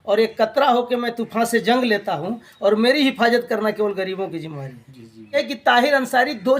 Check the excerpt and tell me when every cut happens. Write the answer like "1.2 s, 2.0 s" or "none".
5.4 s